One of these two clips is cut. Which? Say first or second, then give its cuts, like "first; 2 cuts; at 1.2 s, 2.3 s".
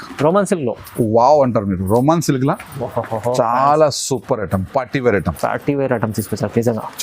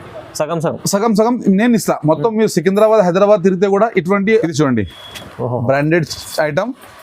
second; 1 cut; at 4.4 s